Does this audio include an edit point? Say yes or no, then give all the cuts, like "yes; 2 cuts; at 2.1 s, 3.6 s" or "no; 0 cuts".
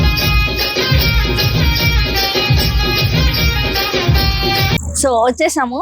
yes; 1 cut; at 4.8 s